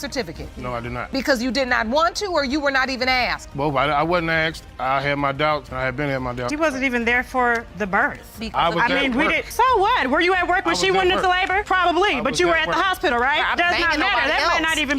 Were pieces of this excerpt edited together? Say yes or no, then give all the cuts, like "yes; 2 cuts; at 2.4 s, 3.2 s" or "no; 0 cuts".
no; 0 cuts